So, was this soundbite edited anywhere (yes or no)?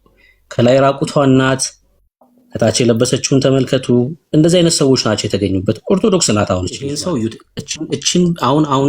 yes